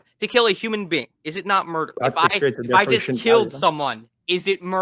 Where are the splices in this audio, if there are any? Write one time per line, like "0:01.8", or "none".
0:02.0